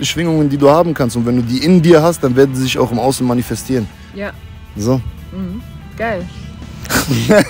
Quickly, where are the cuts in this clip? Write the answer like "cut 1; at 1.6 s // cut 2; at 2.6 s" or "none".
none